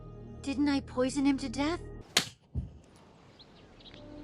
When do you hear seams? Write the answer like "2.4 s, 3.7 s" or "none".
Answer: 2.0 s